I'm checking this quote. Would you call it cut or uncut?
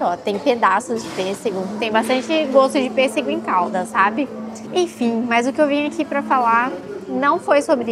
uncut